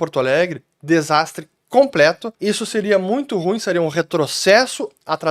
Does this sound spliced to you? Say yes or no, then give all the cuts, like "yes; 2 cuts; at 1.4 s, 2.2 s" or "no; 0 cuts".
no; 0 cuts